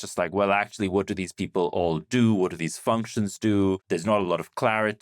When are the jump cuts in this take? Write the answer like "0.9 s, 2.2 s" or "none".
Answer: 3.8 s